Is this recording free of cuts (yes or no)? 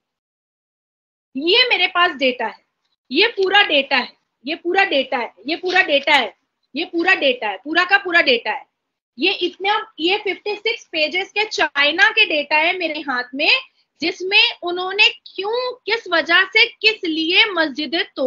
yes